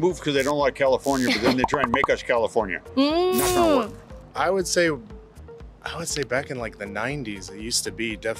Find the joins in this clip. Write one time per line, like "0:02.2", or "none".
none